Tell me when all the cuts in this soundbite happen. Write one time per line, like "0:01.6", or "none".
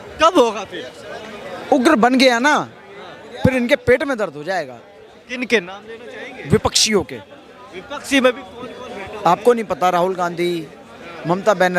none